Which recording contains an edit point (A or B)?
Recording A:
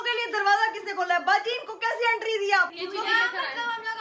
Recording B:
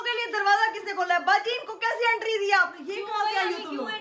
A